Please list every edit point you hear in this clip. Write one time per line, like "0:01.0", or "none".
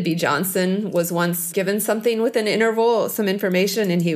0:01.4